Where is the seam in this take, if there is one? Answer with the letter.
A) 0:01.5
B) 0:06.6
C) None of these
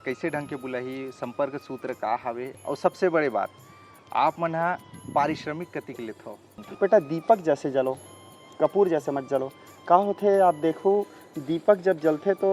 B